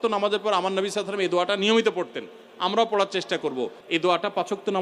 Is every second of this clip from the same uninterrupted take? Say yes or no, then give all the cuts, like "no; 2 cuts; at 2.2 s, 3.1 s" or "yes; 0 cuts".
no; 1 cut; at 3.8 s